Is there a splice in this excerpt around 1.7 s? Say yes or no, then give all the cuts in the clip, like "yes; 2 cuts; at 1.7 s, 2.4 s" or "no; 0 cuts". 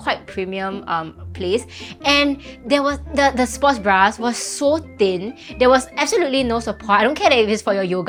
no; 0 cuts